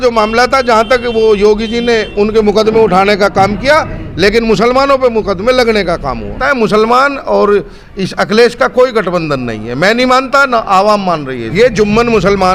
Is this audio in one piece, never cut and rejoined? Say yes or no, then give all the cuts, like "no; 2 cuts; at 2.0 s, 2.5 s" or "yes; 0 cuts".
no; 2 cuts; at 6.4 s, 11.5 s